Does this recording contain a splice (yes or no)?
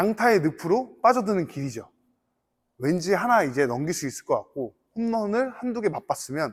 no